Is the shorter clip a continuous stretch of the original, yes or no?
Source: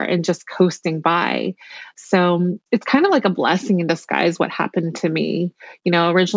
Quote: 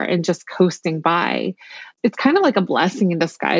no